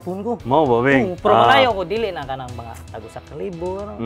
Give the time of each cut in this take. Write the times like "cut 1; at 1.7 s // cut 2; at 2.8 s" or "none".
cut 1; at 1.1 s